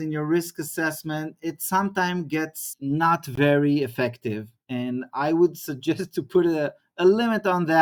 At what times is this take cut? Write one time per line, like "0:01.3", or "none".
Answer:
none

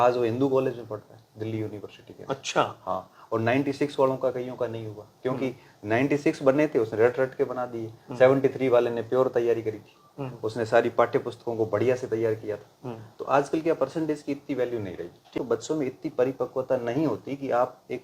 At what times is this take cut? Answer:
0:15.3

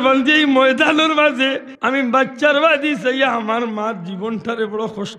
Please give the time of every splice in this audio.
0:01.7

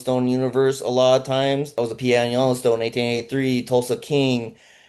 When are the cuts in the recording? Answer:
0:01.8

